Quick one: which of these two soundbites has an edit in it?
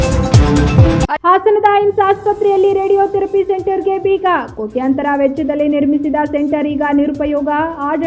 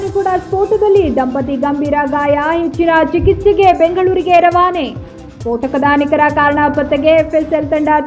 first; 1 cut; at 1.2 s

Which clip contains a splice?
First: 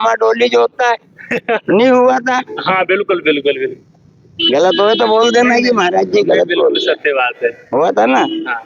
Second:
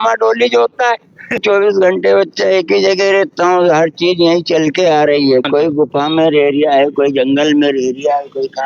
second; 2 cuts; at 1.4 s, 5.5 s

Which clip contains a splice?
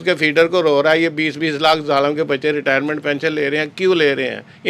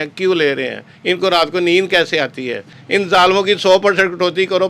second; 1 cut; at 2.7 s

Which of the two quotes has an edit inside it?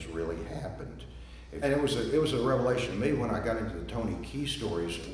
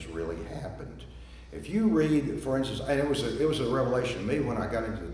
first; 1 cut; at 1.5 s

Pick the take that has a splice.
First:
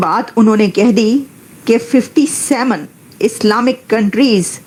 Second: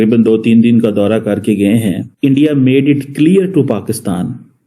second; 1 cut; at 2.1 s

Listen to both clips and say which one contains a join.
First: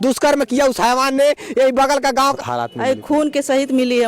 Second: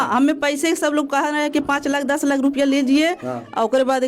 first; 1 cut; at 2.4 s

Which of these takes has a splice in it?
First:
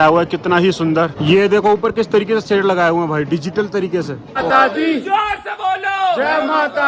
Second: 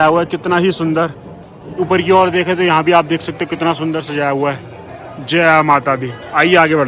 first; 2 cuts; at 1.3 s, 4.4 s

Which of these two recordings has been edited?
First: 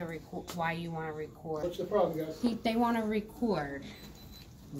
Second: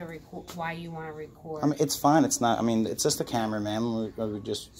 first; 1 cut; at 1.6 s

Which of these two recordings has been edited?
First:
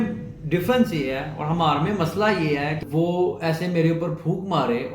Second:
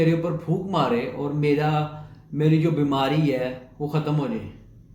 first; 1 cut; at 2.8 s

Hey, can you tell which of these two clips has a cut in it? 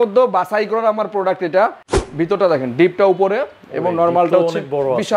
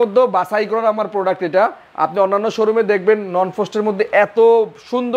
first; 1 cut; at 1.8 s

